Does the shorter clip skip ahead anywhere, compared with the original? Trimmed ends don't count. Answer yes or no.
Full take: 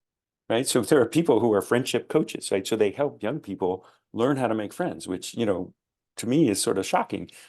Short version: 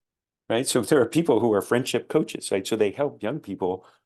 no